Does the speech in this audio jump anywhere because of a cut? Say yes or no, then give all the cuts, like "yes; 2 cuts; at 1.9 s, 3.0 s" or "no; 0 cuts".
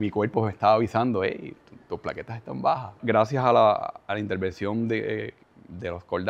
no; 0 cuts